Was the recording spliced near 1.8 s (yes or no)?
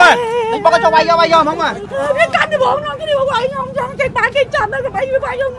yes